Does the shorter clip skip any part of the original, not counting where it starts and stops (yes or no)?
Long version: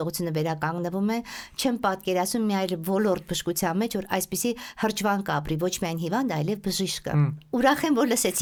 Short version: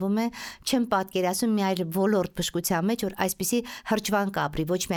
no